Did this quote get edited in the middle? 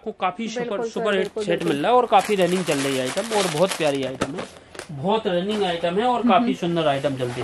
no; 0 cuts

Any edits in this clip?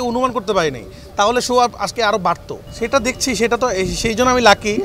no; 0 cuts

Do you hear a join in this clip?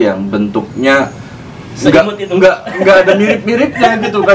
no; 0 cuts

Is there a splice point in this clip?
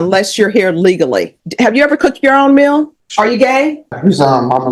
yes; 3 cuts; at 1.4 s, 3.0 s, 4.0 s

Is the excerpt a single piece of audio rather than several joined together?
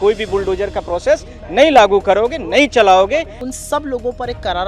no; 1 cut; at 3.4 s

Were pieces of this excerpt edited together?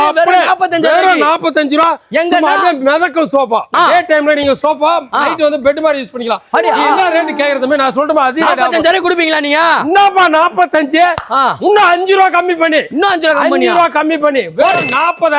yes; 1 cut; at 3.7 s

